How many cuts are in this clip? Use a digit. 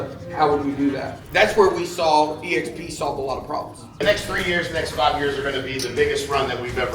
2